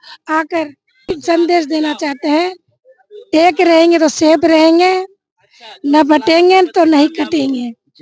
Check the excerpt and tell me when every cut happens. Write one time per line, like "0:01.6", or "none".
0:01.2